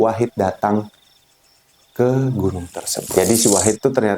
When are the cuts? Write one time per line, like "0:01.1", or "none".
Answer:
0:03.0